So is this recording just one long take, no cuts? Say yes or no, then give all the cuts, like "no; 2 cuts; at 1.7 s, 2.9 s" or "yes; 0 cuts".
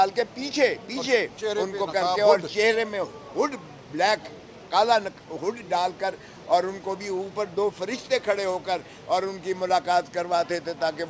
yes; 0 cuts